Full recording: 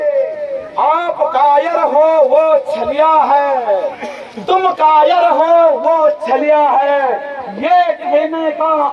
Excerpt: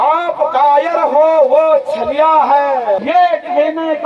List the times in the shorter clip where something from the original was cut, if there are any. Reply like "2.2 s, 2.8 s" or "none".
3.0 s